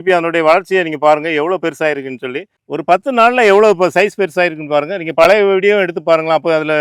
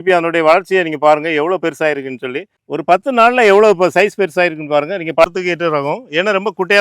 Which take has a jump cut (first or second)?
second